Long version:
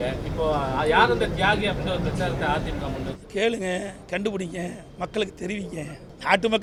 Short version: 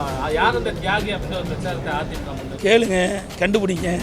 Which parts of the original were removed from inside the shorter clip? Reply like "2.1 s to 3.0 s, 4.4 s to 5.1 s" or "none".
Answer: 3.1 s to 3.2 s